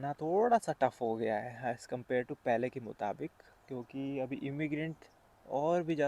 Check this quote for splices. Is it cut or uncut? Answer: uncut